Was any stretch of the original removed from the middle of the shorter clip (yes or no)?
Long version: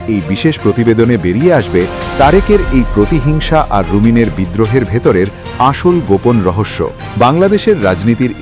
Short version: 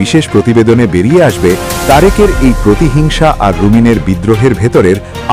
no